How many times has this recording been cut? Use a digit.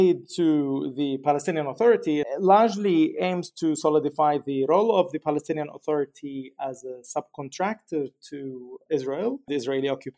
1